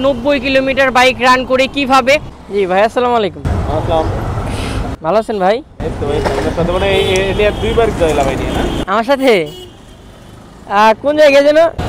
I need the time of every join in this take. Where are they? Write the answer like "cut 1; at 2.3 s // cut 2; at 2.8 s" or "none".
cut 1; at 2.4 s